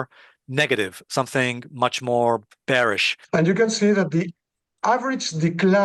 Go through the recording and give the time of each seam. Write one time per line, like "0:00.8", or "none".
0:03.1